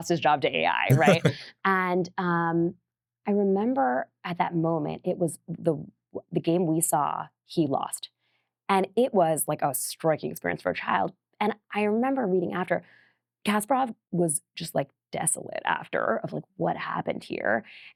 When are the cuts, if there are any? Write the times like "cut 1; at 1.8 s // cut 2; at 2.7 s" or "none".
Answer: none